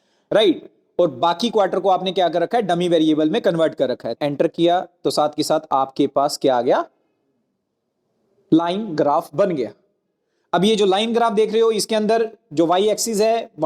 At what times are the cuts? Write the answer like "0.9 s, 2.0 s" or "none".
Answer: 4.1 s